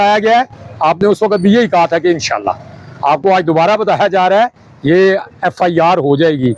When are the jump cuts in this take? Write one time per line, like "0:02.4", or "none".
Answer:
none